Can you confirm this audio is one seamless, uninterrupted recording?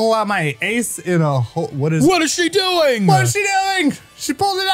no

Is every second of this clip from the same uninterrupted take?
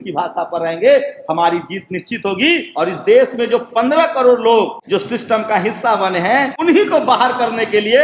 no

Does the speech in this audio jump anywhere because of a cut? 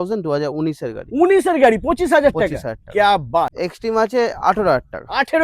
yes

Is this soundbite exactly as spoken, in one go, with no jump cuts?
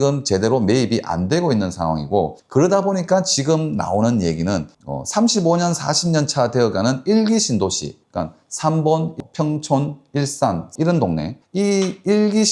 yes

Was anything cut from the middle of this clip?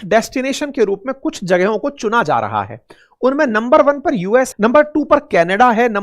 yes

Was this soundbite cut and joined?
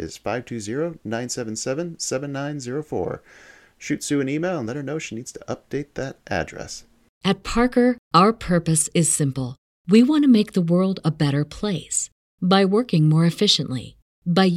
yes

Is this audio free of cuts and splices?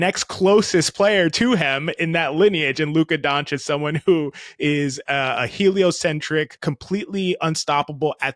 no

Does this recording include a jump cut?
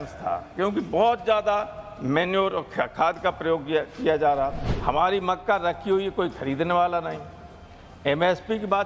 yes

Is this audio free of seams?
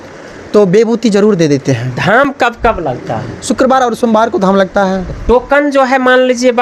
yes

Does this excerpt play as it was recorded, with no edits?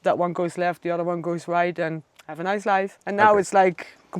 no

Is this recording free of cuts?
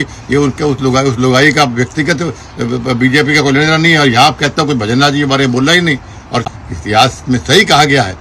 no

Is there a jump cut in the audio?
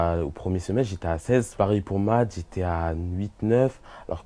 yes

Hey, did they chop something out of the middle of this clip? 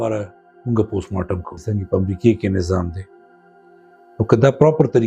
yes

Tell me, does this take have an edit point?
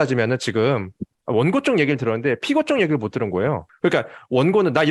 yes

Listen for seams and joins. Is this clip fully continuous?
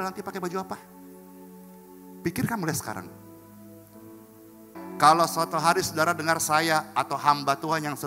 no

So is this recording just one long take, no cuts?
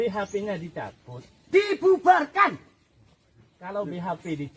yes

